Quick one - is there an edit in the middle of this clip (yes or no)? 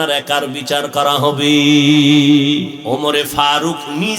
yes